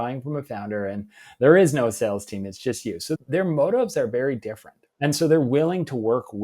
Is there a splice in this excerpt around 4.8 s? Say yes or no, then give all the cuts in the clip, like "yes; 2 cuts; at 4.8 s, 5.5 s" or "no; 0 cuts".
yes; 1 cut; at 4.8 s